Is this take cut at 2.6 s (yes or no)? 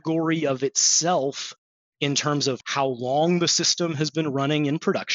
yes